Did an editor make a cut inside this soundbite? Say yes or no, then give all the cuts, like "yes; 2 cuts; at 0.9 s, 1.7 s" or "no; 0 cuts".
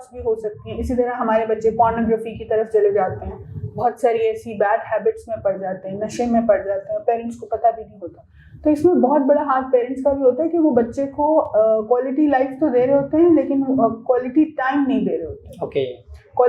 no; 0 cuts